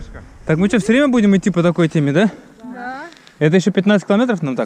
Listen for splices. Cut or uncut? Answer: uncut